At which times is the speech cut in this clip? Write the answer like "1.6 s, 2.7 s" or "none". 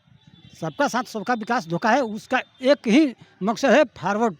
none

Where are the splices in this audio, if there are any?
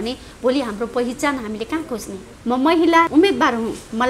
2.3 s, 3.1 s

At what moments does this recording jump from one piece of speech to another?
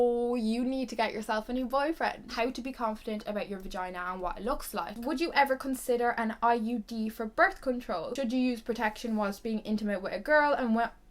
2.2 s, 5.0 s, 8.1 s

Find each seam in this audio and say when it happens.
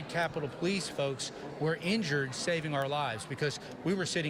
none

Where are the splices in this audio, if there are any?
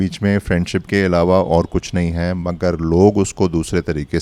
none

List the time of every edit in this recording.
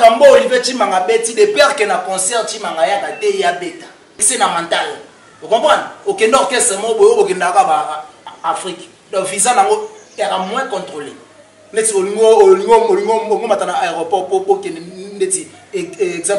4.3 s

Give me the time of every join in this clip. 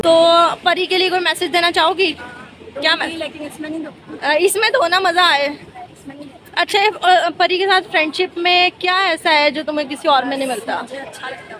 none

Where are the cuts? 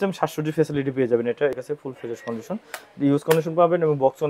1.6 s

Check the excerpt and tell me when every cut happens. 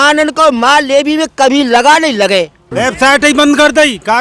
2.6 s

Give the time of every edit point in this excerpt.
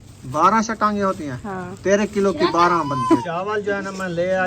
3.2 s

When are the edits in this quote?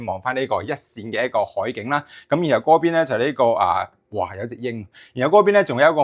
none

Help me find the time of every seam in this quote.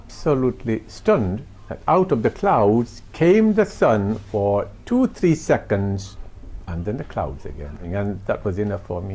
7.9 s

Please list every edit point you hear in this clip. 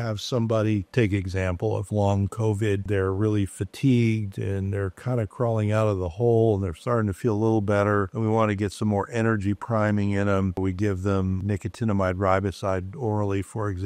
2.8 s, 10.6 s, 11.4 s

